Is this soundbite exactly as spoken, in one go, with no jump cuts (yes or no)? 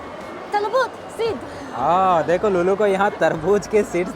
yes